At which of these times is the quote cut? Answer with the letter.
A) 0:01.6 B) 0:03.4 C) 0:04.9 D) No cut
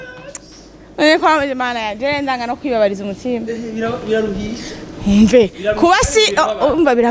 D